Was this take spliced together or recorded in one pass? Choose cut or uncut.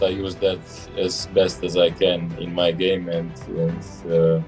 uncut